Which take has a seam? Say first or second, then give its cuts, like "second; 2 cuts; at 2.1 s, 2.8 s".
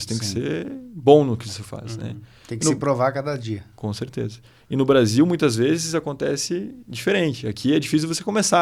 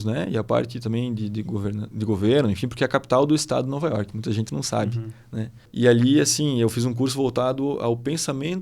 second; 1 cut; at 5.6 s